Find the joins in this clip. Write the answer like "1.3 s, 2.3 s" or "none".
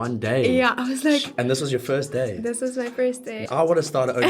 3.4 s